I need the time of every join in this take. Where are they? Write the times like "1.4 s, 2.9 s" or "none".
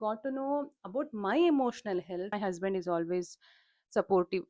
2.4 s